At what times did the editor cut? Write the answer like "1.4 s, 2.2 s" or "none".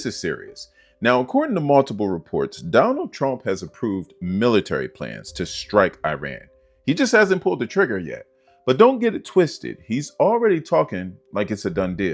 none